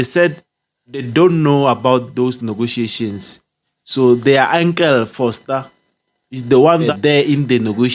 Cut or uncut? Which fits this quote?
cut